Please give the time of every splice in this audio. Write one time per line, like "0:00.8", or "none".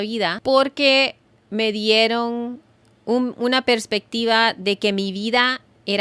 none